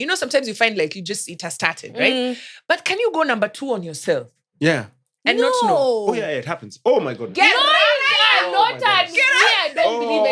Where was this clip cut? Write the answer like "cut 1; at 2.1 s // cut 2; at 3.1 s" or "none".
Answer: none